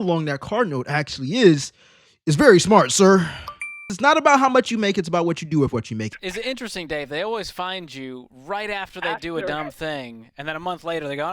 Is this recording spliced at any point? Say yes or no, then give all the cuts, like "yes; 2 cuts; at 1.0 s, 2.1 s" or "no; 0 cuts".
yes; 2 cuts; at 3.9 s, 6.1 s